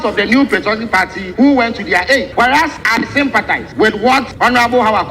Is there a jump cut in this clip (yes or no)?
yes